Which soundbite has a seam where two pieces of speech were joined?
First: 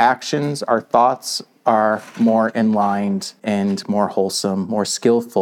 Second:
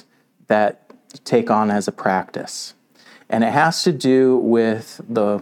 first; 1 cut; at 3.3 s

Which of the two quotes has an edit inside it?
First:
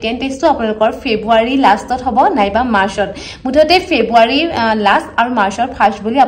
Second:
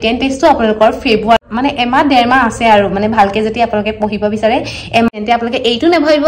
second; 2 cuts; at 1.4 s, 5.1 s

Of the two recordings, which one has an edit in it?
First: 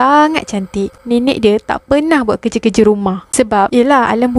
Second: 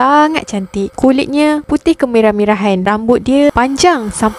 first; 2 cuts; at 0.9 s, 3.2 s

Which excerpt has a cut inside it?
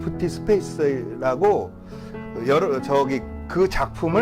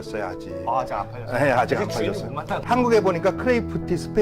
second; 1 cut; at 2.6 s

